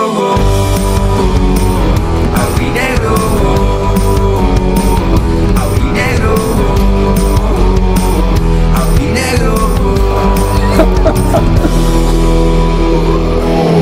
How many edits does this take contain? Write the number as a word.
zero